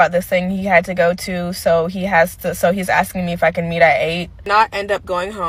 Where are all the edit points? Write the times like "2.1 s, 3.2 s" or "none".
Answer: 4.4 s